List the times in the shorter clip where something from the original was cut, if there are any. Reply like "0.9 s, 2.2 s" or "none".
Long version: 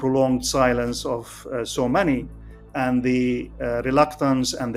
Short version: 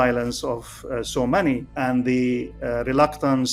1.7 s